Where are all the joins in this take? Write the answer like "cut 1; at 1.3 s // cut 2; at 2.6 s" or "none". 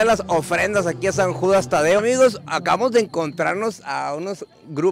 cut 1; at 2.0 s